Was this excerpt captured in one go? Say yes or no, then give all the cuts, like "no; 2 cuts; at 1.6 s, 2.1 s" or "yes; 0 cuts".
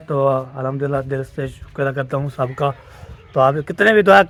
yes; 0 cuts